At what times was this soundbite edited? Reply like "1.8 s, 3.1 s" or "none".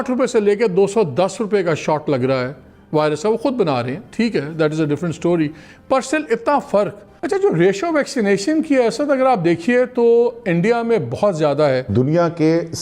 7.2 s, 11.9 s